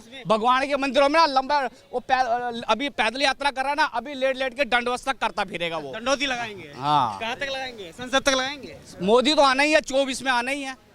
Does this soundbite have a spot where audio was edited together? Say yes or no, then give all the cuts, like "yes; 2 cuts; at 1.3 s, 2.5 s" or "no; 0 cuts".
no; 0 cuts